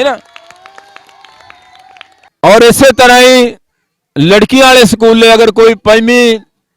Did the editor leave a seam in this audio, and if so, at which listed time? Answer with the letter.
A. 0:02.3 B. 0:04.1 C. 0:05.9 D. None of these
A